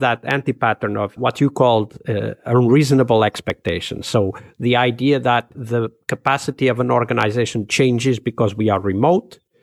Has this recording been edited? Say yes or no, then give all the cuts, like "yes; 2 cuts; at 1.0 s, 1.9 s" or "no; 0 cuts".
yes; 2 cuts; at 1.1 s, 5.6 s